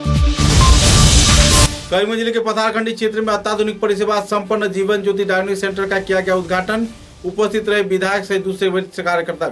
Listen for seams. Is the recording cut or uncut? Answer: uncut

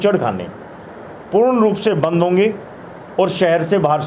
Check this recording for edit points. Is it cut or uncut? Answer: uncut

